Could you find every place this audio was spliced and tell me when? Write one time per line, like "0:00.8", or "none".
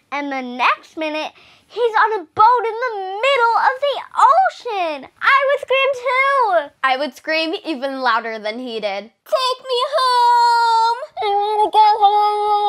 none